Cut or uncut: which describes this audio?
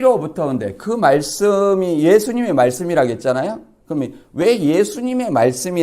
uncut